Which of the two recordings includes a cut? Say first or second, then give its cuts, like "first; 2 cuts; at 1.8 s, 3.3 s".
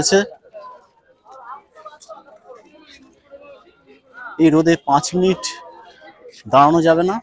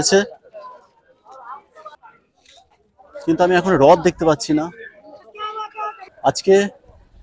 second; 2 cuts; at 2.0 s, 6.1 s